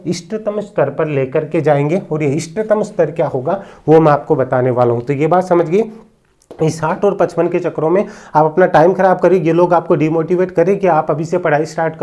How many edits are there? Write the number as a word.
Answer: zero